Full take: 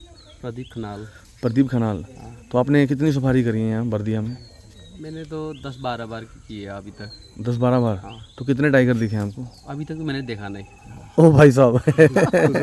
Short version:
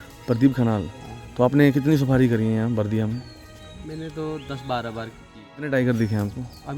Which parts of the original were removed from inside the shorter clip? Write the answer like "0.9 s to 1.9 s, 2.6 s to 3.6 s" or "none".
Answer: 6.8 s to 8.6 s